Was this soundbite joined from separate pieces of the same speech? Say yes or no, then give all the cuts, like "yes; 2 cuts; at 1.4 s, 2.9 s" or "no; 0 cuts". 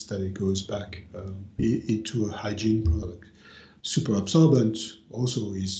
no; 0 cuts